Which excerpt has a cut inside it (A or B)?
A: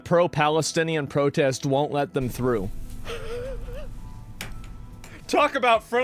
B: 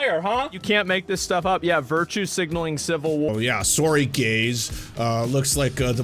B